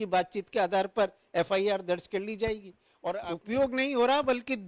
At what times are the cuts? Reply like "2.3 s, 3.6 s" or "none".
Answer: 3.2 s

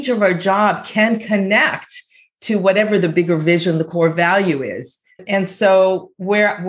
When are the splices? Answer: 5.2 s

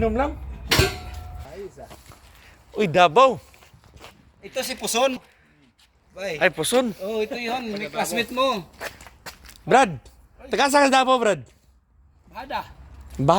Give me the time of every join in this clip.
1.5 s

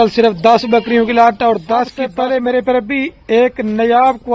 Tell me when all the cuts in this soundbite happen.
2.0 s

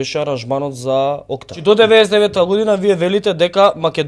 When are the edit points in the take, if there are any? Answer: 1.6 s

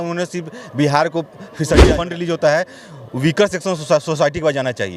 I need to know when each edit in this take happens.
1.9 s

